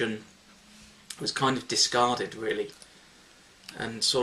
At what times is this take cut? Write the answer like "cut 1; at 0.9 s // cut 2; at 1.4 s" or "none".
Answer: none

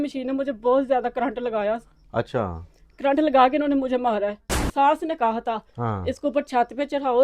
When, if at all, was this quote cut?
cut 1; at 4.6 s

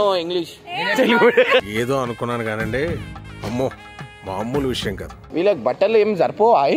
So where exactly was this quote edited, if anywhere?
cut 1; at 5.2 s

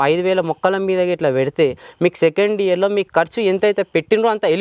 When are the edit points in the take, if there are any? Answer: none

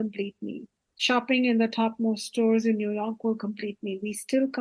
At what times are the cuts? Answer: cut 1; at 1.0 s

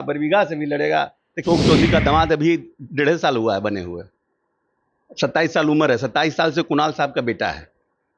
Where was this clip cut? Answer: cut 1; at 1.4 s

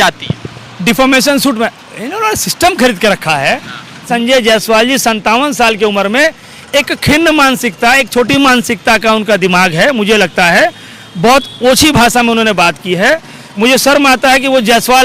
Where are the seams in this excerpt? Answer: cut 1; at 4.1 s

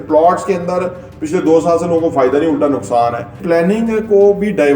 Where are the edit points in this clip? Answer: cut 1; at 3.4 s

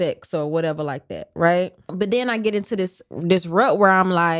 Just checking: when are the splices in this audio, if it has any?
cut 1; at 1.9 s

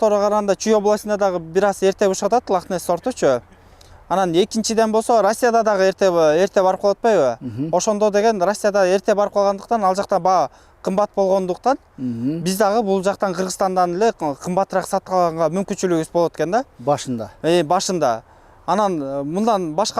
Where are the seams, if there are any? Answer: none

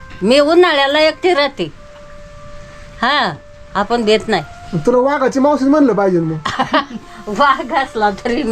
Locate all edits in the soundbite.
none

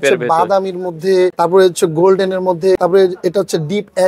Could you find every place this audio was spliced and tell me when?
cut 1; at 1.3 s // cut 2; at 2.8 s

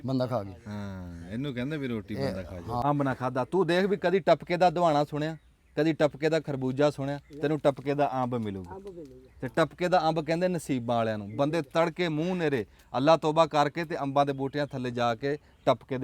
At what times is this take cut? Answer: cut 1; at 2.8 s

